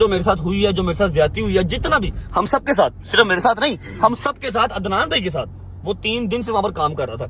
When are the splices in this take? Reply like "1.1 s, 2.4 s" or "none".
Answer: none